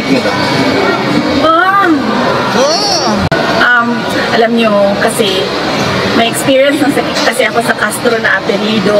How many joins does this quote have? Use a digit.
1